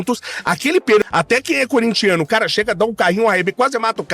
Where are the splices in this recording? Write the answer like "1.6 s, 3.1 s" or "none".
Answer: 1.0 s